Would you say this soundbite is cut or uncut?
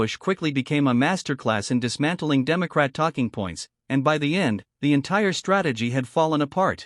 uncut